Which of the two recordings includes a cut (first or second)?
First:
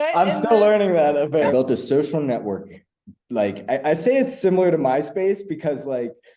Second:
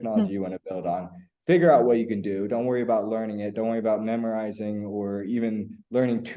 first